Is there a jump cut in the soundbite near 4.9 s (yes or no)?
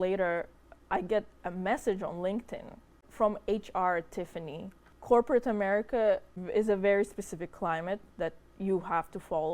yes